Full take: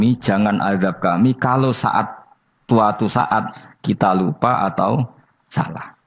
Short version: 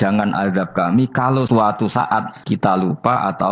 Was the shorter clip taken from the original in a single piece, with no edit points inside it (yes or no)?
no